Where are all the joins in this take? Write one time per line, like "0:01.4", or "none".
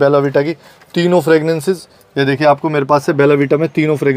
none